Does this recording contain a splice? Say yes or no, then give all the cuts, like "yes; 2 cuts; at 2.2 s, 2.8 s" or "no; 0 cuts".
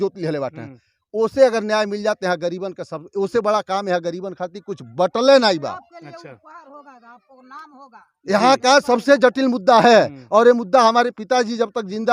no; 0 cuts